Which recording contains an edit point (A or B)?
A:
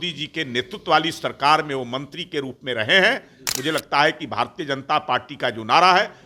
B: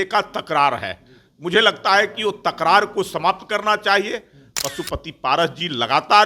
B